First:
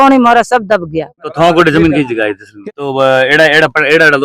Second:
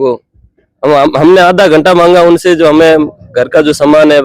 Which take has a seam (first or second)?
first